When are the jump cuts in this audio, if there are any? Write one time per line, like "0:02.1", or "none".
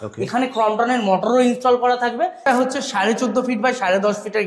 0:02.4